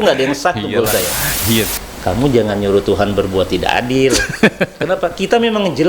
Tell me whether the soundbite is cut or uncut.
cut